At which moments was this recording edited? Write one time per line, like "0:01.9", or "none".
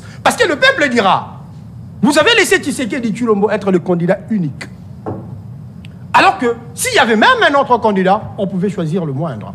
none